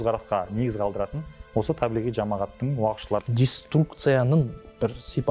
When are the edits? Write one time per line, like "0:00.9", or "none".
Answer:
0:03.2